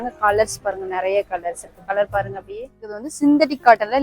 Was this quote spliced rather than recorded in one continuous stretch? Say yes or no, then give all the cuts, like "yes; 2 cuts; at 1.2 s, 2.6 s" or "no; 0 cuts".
yes; 1 cut; at 3.0 s